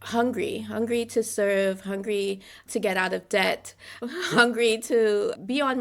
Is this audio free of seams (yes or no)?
yes